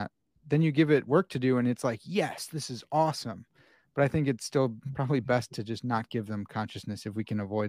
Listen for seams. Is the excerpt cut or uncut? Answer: uncut